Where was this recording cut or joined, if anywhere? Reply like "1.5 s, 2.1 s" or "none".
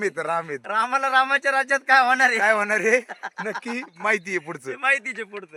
none